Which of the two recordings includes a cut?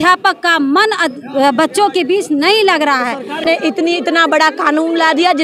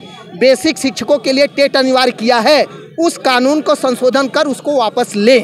first; 1 cut; at 3.4 s

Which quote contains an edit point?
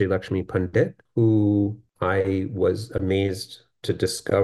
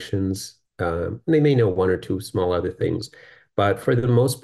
first; 2 cuts; at 1.0 s, 1.8 s

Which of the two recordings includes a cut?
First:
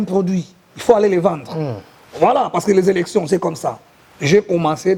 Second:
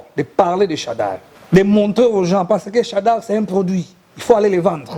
second; 1 cut; at 1.3 s

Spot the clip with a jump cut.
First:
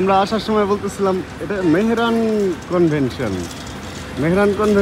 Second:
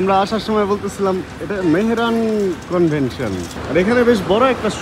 second; 1 cut; at 3.5 s

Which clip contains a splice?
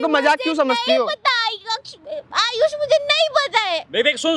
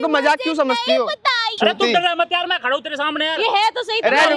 second; 1 cut; at 1.5 s

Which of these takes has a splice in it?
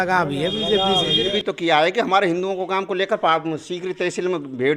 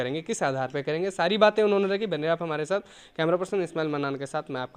first; 1 cut; at 1.3 s

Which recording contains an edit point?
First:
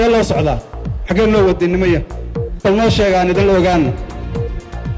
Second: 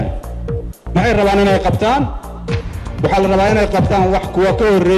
first; 1 cut; at 4.1 s

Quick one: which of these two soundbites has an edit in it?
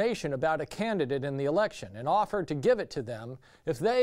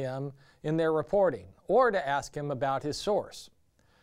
first; 1 cut; at 1.4 s

